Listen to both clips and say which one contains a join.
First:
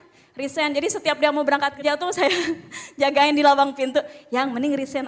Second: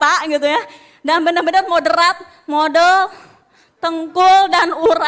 first; 1 cut; at 1.8 s

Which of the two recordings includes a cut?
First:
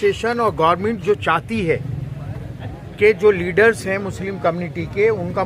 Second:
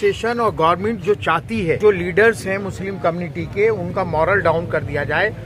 second; 1 cut; at 1.8 s

